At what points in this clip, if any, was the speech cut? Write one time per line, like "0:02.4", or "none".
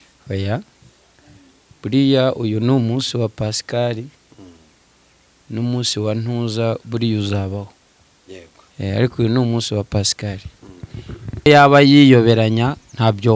0:11.5